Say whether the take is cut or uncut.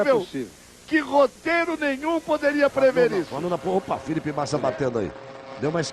cut